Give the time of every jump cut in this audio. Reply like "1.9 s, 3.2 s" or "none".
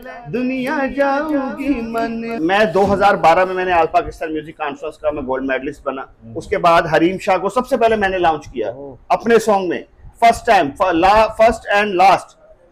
2.3 s